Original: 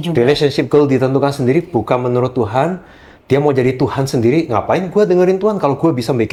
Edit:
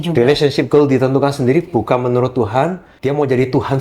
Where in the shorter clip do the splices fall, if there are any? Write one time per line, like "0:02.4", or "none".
0:02.9